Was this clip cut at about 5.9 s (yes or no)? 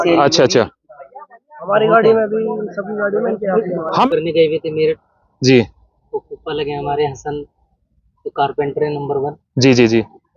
no